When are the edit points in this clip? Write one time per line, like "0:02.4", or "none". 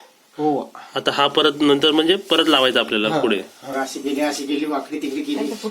0:03.8

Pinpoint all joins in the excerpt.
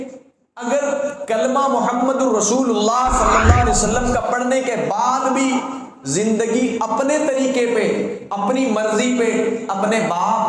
none

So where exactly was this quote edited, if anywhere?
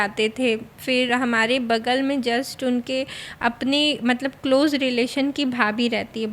none

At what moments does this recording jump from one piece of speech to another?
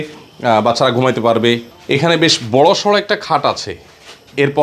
0:01.7

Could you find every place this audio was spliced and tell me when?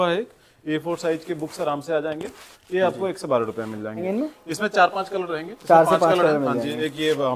0:04.0

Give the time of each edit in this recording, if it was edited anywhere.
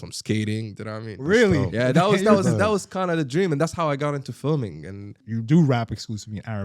0:05.2

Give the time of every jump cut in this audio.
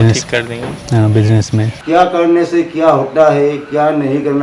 0:01.8

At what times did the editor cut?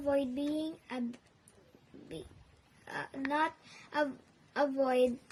none

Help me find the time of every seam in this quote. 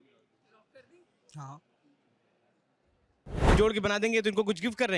0:03.5

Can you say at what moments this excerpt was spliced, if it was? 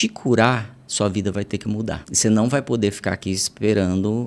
0:02.1

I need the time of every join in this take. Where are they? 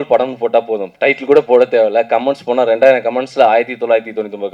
none

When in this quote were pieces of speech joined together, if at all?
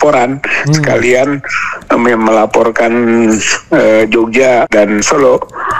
0:04.7

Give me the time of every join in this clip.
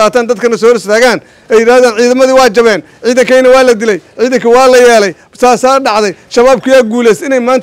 none

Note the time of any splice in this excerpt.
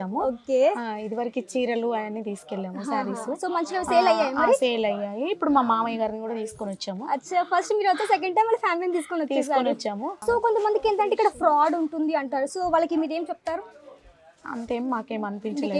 0:10.2

